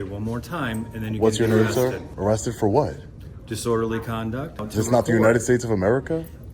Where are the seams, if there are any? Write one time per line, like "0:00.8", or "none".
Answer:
0:02.1
0:04.6

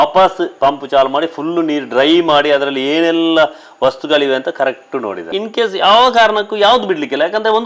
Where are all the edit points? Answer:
0:05.3

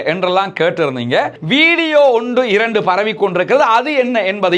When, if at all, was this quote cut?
0:01.4

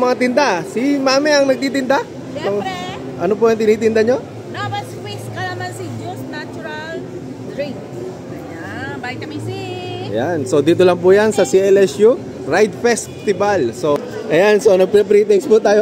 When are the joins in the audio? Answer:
0:14.0

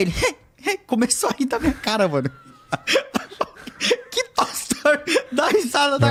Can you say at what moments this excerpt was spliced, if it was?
none

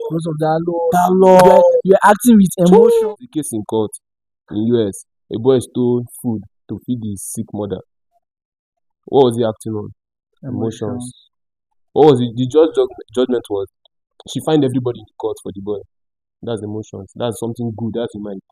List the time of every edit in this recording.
0:03.0

